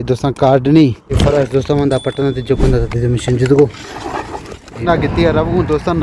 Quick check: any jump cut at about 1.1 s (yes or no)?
yes